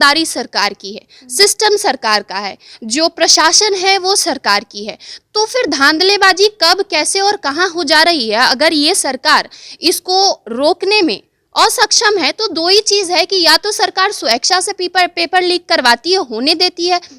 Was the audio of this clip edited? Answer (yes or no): no